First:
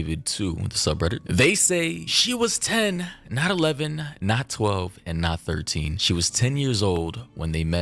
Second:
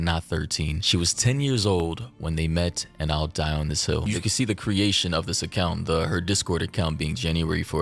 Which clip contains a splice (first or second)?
second